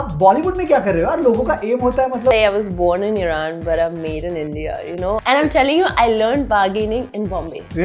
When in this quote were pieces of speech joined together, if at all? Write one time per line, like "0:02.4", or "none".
0:02.3
0:05.2

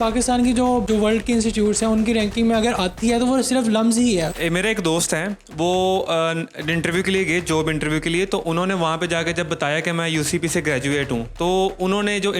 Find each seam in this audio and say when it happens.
0:00.9
0:04.3

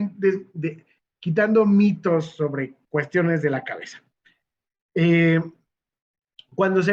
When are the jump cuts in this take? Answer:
none

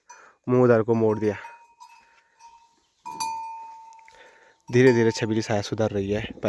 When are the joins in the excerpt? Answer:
none

